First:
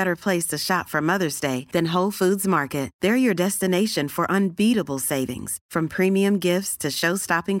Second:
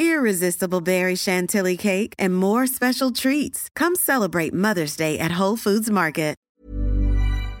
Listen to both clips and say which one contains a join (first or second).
second